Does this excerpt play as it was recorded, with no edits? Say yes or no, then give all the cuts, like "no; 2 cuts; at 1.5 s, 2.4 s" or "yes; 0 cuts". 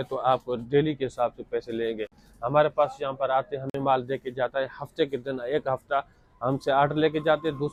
yes; 0 cuts